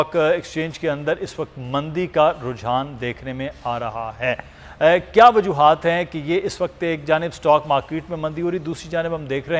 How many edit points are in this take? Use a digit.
0